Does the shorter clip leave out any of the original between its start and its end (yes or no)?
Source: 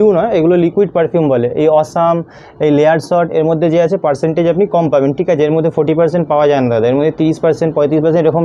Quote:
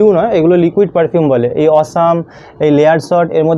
no